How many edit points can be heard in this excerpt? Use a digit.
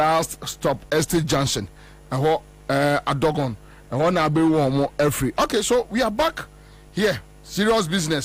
0